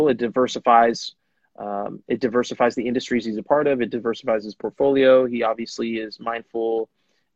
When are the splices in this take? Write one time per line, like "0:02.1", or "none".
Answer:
none